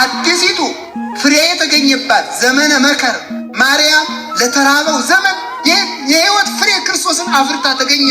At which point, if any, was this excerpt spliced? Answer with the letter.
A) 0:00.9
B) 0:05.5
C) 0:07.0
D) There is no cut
D